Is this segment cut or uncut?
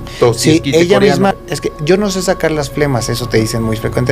cut